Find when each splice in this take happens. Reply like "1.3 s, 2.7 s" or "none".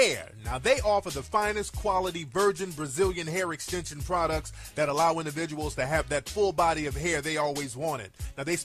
none